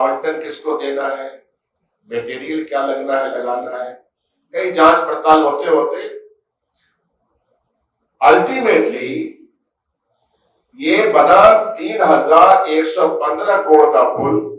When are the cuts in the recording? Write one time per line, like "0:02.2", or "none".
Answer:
none